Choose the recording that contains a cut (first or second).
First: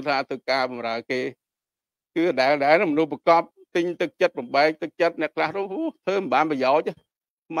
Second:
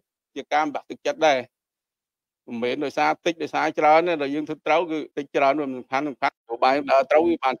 second